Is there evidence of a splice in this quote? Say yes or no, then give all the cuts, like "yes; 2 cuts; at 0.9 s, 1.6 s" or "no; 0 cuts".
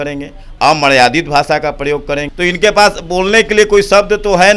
yes; 1 cut; at 2.3 s